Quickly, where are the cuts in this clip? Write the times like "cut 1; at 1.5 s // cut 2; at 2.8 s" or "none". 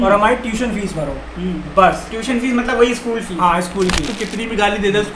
cut 1; at 4.1 s